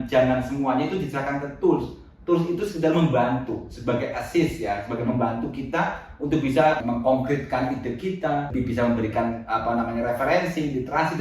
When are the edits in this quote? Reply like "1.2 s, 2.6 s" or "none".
6.8 s, 8.5 s